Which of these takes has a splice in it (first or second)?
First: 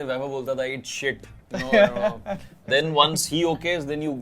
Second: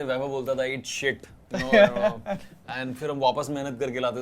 first